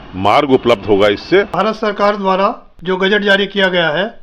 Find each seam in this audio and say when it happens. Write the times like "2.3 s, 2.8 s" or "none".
1.5 s, 2.7 s